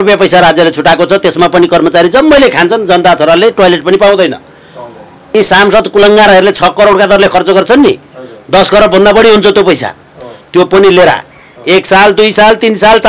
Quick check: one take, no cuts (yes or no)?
no